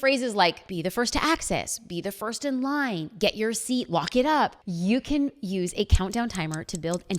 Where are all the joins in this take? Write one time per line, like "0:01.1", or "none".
0:04.5